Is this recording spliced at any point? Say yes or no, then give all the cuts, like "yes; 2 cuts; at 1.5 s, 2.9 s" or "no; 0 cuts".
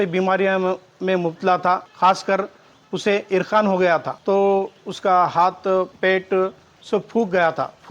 yes; 3 cuts; at 1.9 s, 4.1 s, 5.9 s